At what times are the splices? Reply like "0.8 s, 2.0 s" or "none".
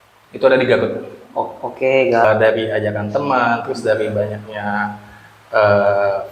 2.2 s